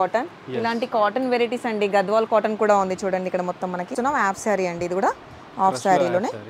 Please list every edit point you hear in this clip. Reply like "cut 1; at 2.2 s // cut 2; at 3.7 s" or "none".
cut 1; at 3.9 s